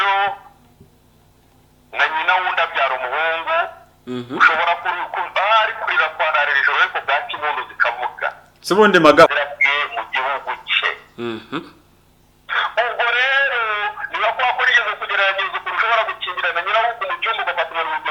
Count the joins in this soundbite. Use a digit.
1